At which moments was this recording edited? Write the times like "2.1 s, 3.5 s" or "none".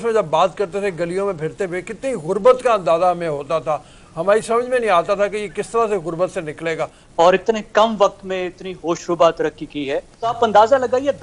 7.0 s, 10.3 s